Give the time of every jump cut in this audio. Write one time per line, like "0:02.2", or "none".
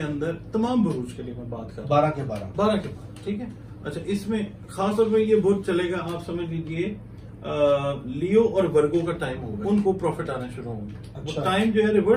0:09.5